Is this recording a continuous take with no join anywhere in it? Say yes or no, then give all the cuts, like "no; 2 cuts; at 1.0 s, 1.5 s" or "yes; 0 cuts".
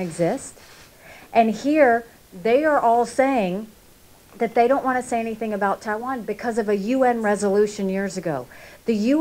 yes; 0 cuts